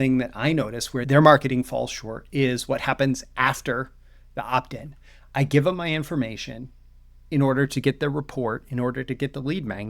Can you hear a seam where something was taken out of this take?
yes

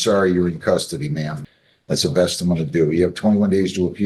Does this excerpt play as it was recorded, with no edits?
no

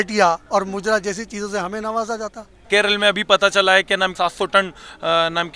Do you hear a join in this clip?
yes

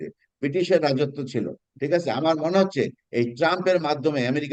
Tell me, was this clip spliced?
no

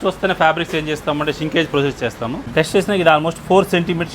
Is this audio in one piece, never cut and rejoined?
no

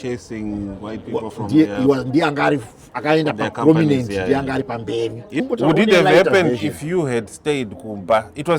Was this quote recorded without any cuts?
no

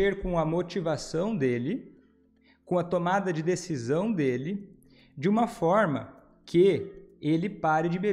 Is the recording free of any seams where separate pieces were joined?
yes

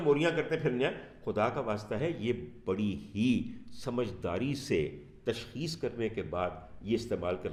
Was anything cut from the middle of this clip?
no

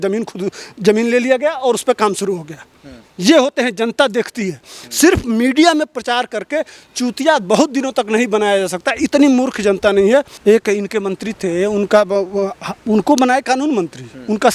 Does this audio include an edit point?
yes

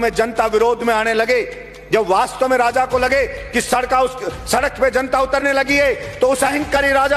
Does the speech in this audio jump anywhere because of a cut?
no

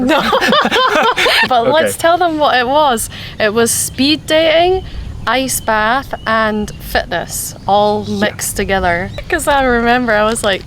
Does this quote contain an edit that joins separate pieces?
yes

